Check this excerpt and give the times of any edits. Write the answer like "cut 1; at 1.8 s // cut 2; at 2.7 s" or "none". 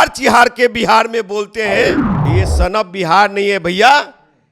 cut 1; at 2.1 s